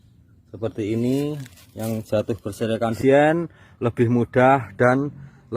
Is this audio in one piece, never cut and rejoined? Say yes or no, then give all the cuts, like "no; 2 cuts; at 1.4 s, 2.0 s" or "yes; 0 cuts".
no; 1 cut; at 3.0 s